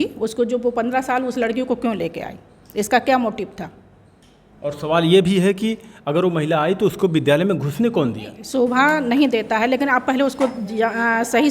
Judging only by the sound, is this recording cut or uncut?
cut